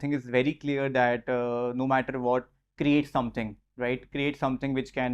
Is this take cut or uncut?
uncut